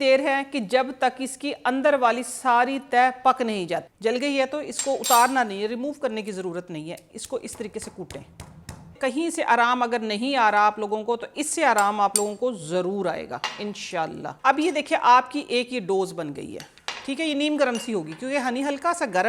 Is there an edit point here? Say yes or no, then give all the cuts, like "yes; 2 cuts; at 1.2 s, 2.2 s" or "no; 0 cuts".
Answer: yes; 3 cuts; at 3.9 s, 8.9 s, 14.3 s